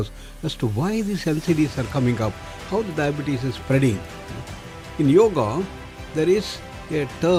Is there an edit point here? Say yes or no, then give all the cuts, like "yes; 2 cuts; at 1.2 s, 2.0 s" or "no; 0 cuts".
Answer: no; 0 cuts